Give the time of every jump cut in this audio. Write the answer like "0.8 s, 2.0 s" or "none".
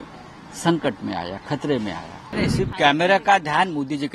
2.3 s